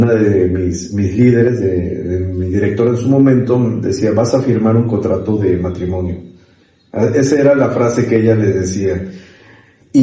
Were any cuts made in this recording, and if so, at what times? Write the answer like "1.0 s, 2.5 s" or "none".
none